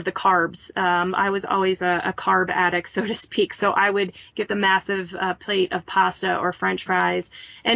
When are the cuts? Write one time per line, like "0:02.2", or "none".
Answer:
none